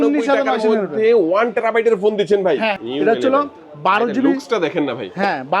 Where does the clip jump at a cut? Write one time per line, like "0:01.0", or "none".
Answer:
0:02.8